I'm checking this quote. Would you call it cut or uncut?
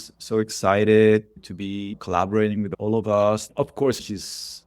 cut